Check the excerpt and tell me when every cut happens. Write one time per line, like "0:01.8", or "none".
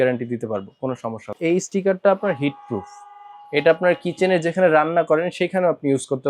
0:01.3

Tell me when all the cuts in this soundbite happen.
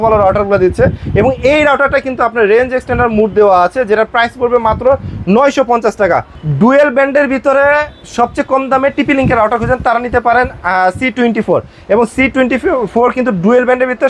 0:06.4

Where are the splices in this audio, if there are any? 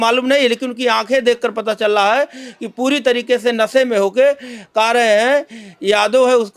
none

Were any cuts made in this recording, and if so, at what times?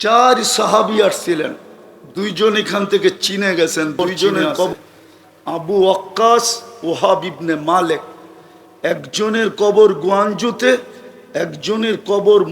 0:04.7

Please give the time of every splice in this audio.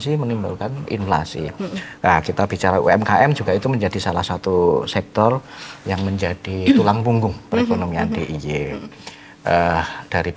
none

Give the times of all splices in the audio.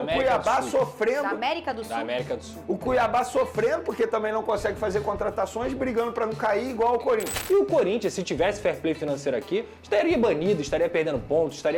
0:07.4

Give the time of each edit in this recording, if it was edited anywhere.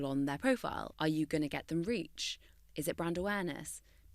0:00.9

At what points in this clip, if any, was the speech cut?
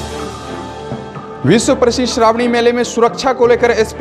0:01.1

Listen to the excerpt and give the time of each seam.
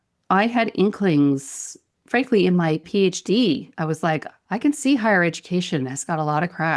0:02.8
0:04.3

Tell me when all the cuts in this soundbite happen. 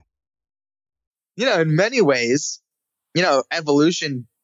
0:01.4

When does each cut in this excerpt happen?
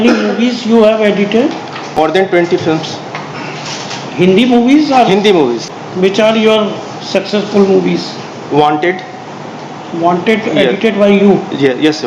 0:02.0
0:05.8

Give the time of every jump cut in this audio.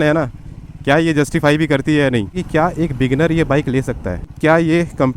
0:02.4
0:04.2

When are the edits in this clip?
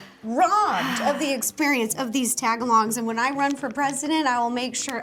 none

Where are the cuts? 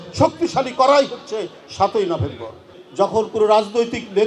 0:02.8

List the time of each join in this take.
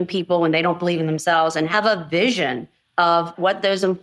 0:01.7
0:03.1

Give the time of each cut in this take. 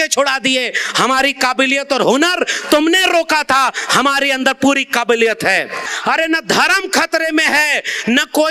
0:05.9

